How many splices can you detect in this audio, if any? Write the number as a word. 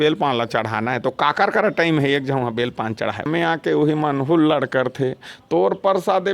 one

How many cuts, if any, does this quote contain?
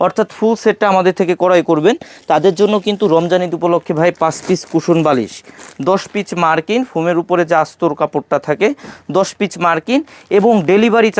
zero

